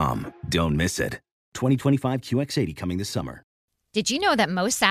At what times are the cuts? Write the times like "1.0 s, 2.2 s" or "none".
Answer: 3.6 s